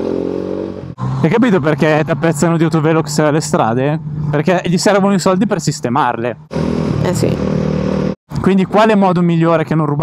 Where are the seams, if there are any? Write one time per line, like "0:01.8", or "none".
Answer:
0:00.9